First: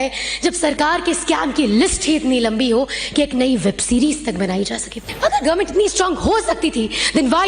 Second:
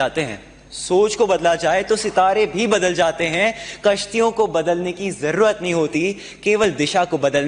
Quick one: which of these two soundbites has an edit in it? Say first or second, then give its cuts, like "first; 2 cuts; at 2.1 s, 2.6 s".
first; 1 cut; at 5.0 s